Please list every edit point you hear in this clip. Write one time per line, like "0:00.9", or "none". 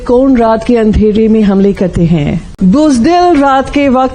0:02.5